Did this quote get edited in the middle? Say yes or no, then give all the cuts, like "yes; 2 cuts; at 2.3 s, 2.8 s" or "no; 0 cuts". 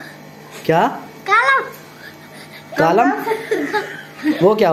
no; 0 cuts